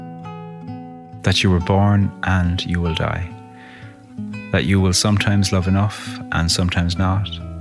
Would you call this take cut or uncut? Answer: cut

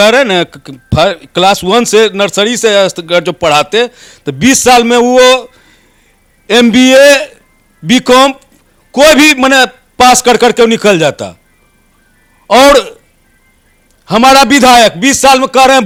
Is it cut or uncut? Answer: uncut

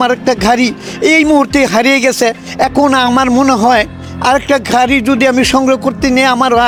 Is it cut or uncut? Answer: uncut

